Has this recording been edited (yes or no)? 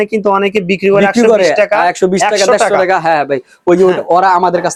no